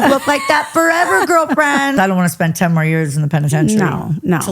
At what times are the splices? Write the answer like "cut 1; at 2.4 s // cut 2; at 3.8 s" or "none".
cut 1; at 1.9 s